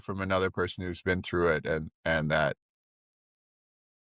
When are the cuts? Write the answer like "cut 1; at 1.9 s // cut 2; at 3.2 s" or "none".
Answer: none